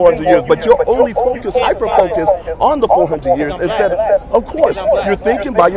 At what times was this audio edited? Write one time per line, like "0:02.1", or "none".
0:01.2